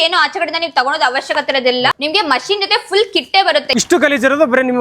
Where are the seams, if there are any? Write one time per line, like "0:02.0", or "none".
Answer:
0:02.0
0:03.7